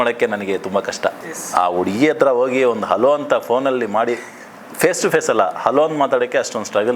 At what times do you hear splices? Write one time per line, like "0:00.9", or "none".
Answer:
0:01.2